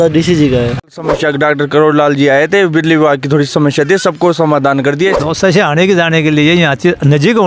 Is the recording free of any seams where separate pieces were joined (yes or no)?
no